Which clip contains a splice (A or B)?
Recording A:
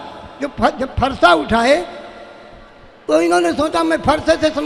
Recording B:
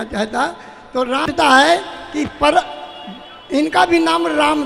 B